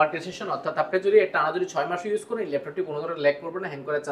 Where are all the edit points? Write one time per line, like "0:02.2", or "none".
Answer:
none